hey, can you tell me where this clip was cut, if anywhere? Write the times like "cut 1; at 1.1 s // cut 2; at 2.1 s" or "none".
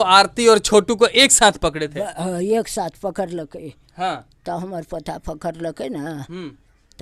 none